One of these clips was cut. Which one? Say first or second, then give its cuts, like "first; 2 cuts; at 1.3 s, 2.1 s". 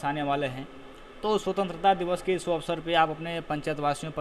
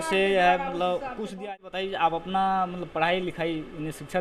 second; 1 cut; at 1.4 s